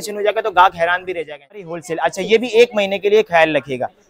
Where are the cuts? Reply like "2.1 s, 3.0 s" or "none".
1.7 s